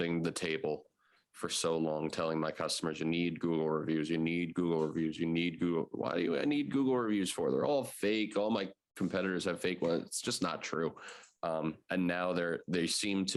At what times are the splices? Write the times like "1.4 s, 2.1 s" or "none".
none